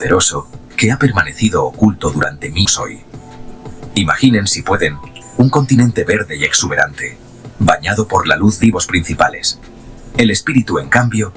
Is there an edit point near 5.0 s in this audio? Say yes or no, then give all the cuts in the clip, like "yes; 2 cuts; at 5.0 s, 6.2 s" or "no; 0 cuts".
no; 2 cuts; at 2.7 s, 8.6 s